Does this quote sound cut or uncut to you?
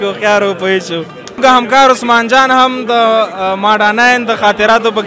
cut